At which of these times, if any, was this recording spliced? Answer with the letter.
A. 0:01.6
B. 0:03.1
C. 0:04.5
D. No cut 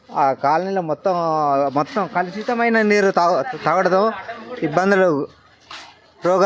D